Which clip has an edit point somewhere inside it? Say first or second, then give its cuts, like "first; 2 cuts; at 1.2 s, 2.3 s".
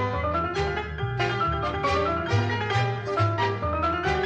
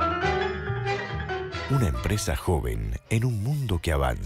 second; 1 cut; at 1.6 s